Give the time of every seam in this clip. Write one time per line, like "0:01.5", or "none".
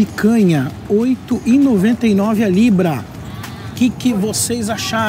none